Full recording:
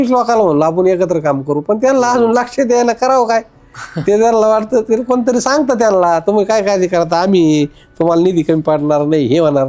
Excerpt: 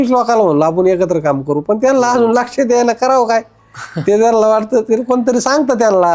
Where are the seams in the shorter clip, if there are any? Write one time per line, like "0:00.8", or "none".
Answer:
none

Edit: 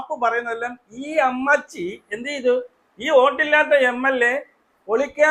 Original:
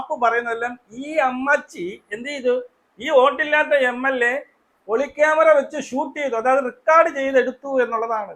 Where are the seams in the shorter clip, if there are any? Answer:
none

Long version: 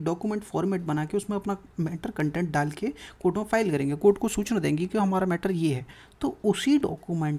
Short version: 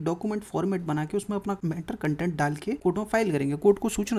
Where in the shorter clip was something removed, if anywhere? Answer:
0:01.6
0:02.8

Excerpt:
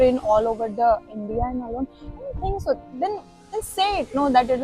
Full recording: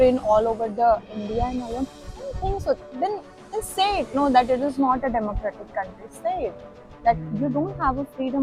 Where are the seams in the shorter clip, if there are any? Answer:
none

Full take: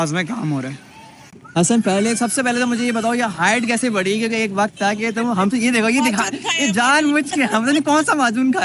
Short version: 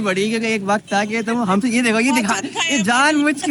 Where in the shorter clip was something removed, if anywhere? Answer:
none

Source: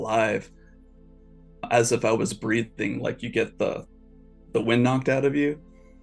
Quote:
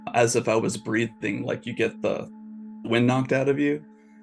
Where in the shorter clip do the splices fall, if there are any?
0:02.9

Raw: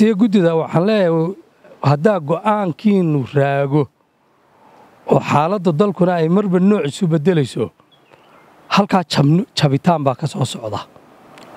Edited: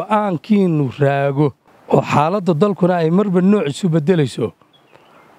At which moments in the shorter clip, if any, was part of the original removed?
0:01.7

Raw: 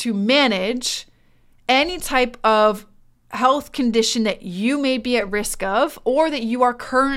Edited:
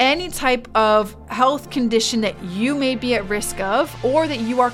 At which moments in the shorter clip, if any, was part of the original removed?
0:01.2

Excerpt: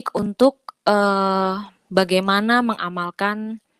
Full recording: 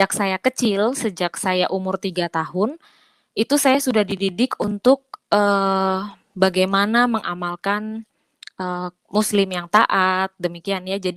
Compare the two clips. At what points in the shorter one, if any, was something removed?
none

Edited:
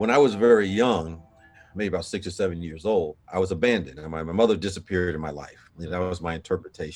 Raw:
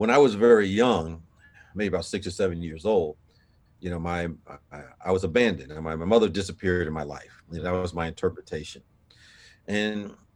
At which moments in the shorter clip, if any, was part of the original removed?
0:03.2

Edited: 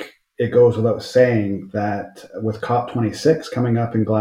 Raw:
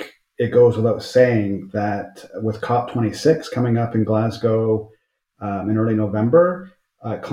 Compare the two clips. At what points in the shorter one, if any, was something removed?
none

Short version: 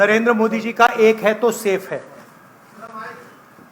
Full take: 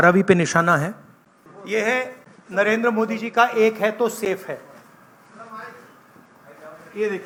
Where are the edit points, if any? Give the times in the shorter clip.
none

